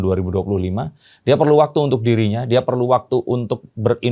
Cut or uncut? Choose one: uncut